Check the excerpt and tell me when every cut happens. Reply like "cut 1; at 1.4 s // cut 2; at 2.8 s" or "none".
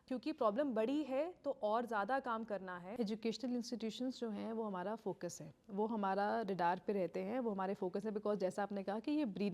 cut 1; at 2.8 s